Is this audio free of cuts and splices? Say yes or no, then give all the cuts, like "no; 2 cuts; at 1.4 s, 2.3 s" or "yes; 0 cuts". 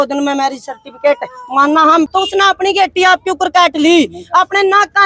no; 1 cut; at 2.1 s